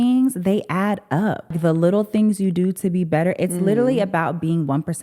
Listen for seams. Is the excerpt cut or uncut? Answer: cut